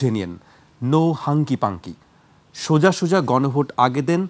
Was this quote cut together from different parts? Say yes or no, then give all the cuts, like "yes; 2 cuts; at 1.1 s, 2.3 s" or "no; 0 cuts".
no; 0 cuts